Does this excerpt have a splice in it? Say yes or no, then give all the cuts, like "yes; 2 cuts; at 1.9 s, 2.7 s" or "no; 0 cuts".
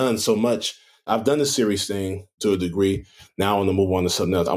no; 0 cuts